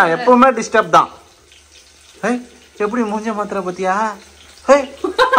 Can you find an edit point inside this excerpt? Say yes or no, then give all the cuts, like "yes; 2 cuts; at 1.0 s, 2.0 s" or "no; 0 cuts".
no; 0 cuts